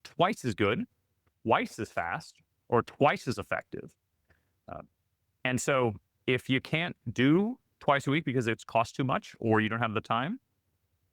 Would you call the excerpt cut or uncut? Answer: uncut